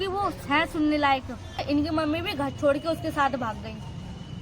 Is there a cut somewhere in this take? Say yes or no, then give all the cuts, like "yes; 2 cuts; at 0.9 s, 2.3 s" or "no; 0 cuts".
yes; 1 cut; at 1.6 s